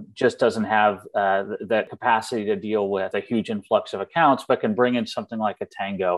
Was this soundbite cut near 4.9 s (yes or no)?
no